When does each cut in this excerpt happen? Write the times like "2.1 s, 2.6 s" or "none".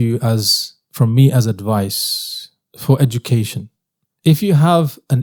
none